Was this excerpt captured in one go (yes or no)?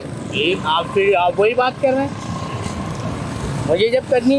yes